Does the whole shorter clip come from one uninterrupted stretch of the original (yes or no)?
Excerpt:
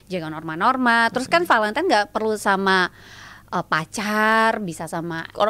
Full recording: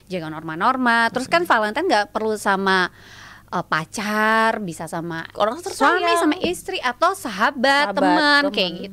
yes